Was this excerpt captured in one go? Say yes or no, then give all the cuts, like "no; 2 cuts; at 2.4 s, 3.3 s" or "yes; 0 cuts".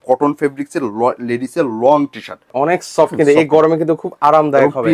no; 1 cut; at 2.5 s